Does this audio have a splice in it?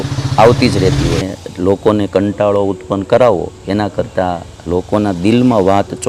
yes; 1 cut; at 1.2 s

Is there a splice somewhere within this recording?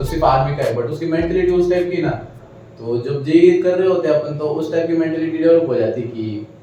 no; 0 cuts

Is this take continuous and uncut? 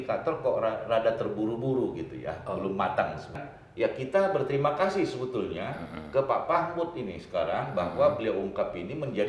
no; 1 cut; at 3.5 s

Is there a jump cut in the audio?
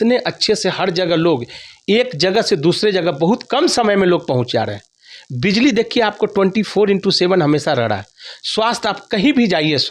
no; 0 cuts

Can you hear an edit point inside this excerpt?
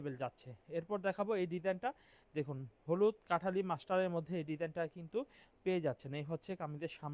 no; 0 cuts

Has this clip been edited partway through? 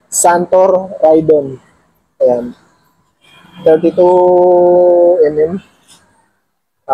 no; 0 cuts

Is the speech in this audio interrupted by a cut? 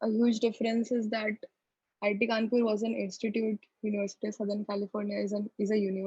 no; 0 cuts

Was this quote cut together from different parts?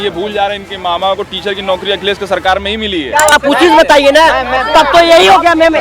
yes; 1 cut; at 3.3 s

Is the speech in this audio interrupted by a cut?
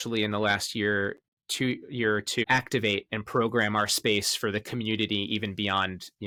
no; 0 cuts

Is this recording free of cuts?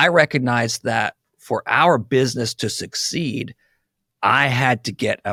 yes; 0 cuts

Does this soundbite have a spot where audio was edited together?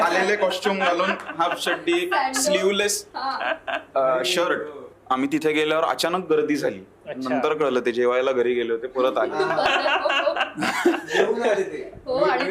yes; 1 cut; at 4.9 s

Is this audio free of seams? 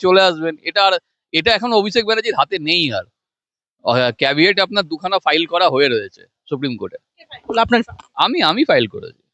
yes; 0 cuts

